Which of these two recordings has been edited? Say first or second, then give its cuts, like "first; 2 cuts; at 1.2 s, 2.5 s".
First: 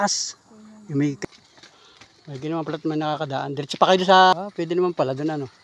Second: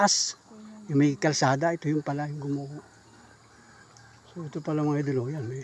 first; 2 cuts; at 1.2 s, 4.3 s